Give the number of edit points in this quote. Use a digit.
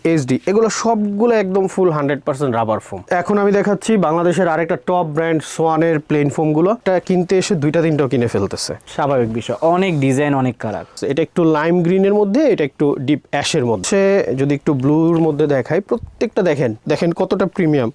5